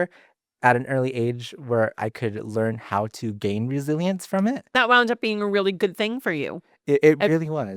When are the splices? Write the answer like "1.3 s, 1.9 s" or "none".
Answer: 2.0 s, 4.7 s